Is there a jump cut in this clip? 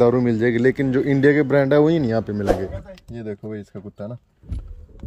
yes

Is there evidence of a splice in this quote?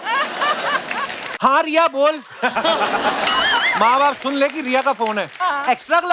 yes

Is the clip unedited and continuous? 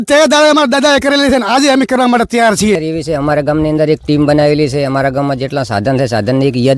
no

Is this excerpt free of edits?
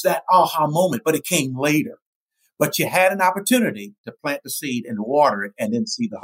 yes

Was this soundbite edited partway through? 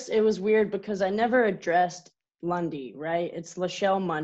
no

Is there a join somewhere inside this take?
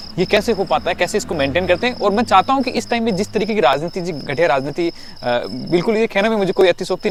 no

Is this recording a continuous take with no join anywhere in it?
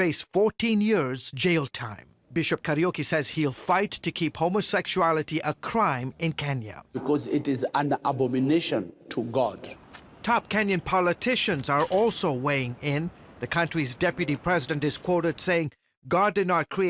yes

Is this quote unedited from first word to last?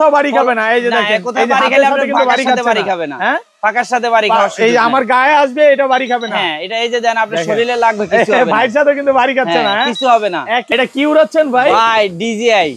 no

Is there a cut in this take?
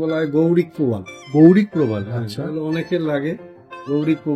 no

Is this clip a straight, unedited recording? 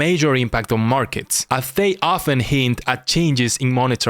yes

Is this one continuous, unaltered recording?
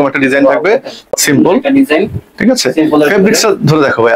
yes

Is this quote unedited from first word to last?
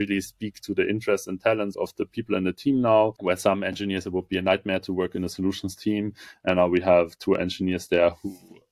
no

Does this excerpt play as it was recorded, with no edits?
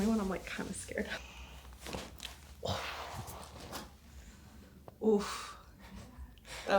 no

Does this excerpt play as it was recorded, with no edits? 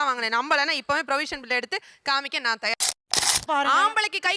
no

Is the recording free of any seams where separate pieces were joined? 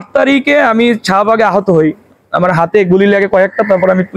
yes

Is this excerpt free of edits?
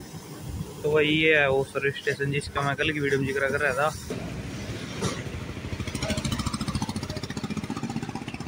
no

